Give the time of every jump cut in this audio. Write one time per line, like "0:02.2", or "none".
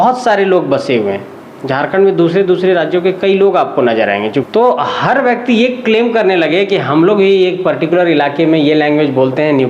0:04.4